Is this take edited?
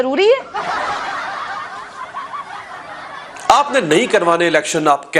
yes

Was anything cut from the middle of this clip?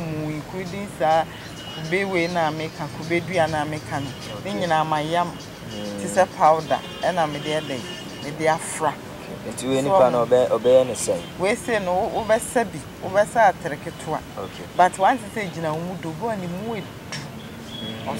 no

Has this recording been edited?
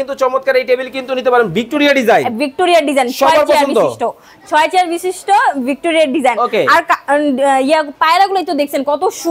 no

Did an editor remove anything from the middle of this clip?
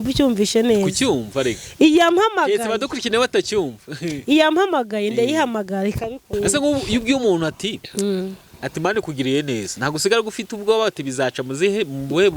yes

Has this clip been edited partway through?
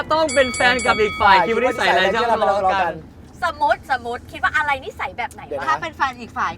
no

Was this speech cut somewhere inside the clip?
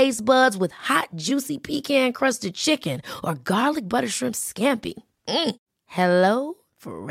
no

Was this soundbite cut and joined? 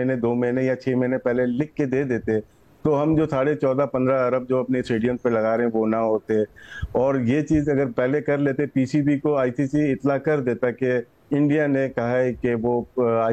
no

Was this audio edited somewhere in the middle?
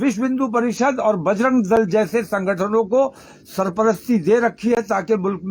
no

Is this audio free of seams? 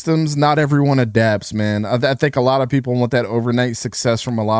yes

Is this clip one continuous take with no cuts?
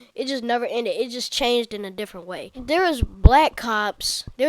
no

